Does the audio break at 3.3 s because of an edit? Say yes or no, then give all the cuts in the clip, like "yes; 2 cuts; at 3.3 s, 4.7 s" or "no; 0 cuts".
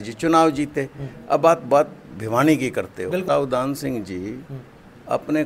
yes; 1 cut; at 3.3 s